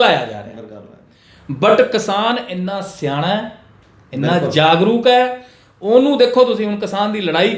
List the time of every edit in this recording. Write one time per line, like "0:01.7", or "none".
none

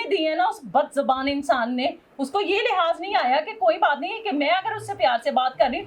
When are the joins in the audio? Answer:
none

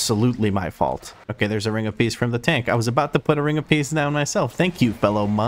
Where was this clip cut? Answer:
0:01.1

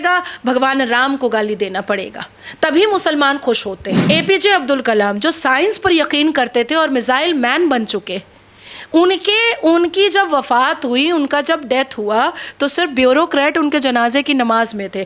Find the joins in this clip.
0:03.9

